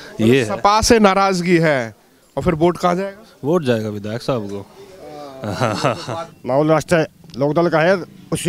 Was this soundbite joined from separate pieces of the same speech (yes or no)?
yes